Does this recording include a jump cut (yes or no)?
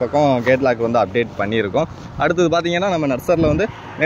no